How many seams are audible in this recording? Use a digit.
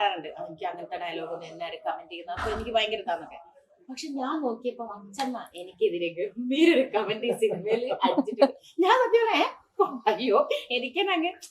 0